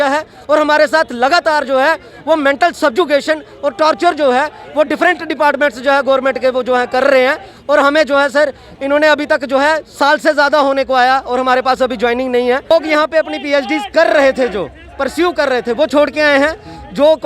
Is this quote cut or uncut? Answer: cut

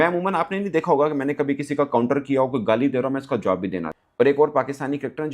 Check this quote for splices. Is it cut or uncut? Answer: cut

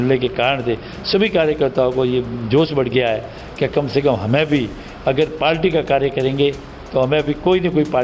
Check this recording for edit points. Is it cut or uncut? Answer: uncut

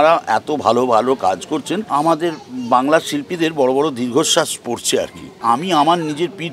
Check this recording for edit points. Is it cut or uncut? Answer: cut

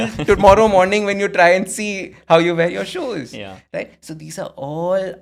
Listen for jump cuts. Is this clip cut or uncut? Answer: uncut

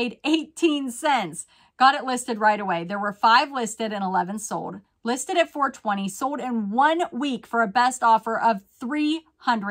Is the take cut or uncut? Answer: uncut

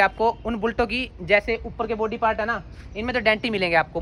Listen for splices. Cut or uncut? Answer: uncut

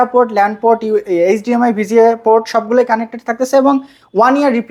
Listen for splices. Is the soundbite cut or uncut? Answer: uncut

